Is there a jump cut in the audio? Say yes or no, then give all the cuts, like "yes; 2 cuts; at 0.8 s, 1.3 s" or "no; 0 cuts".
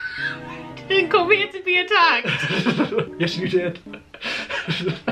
no; 0 cuts